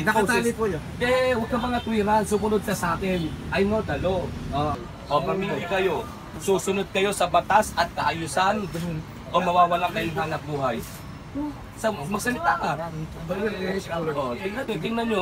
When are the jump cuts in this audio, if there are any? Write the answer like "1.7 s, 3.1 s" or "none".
4.8 s